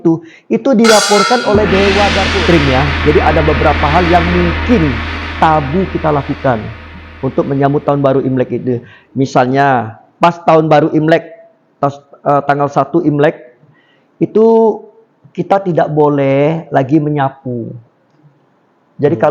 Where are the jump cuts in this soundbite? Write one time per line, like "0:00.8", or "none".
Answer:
0:02.3